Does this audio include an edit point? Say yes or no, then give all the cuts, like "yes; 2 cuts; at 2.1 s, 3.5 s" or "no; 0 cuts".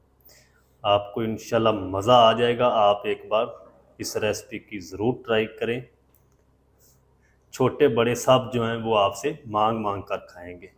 no; 0 cuts